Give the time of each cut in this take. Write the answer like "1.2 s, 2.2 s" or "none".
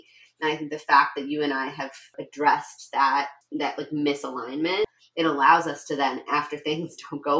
2.2 s, 3.4 s, 5.0 s